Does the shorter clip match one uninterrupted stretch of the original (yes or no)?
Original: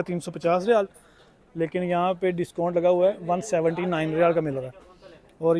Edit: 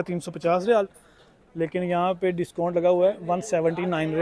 yes